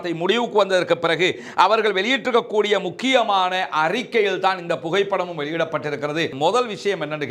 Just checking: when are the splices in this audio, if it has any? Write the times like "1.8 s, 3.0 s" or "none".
6.3 s